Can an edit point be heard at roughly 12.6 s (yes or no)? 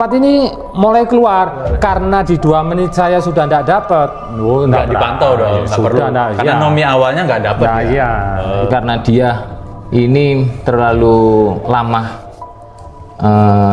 no